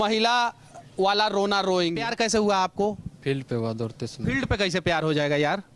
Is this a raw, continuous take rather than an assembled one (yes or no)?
no